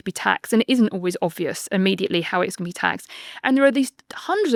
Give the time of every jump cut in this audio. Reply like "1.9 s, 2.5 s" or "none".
none